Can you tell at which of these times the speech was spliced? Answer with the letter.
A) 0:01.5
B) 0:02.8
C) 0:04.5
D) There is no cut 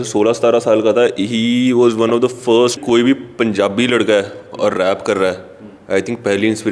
B